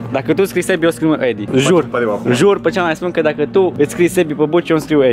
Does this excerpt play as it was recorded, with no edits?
no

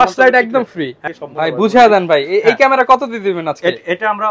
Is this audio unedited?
no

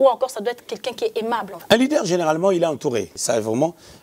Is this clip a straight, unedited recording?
no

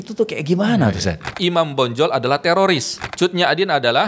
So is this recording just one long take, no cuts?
no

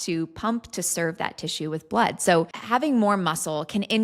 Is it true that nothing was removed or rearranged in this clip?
no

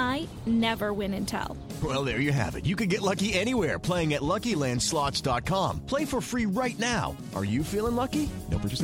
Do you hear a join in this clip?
no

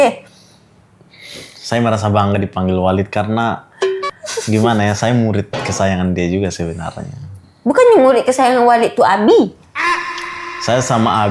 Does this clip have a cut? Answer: no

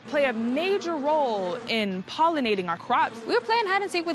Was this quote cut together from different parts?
yes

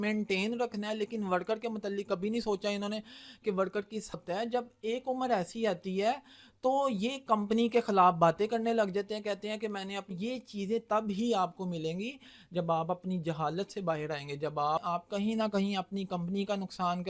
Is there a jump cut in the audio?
yes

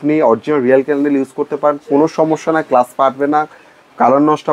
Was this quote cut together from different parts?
no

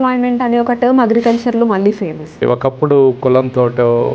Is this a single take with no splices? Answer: no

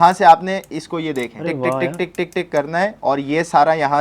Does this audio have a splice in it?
yes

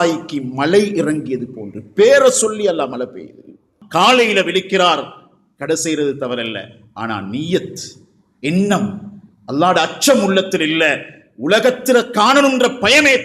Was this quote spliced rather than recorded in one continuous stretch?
yes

